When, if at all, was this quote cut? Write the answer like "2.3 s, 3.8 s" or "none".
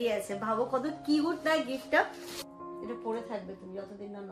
2.2 s